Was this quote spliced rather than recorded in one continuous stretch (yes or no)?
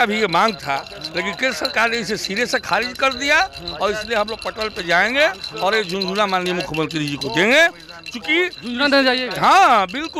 no